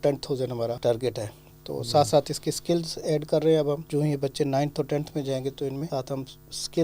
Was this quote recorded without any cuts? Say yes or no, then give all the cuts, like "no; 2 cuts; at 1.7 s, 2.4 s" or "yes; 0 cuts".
no; 3 cuts; at 0.8 s, 3.8 s, 5.9 s